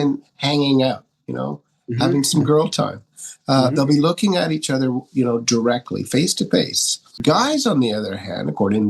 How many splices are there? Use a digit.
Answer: 1